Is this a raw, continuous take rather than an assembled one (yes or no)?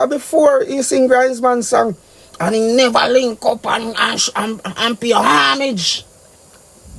yes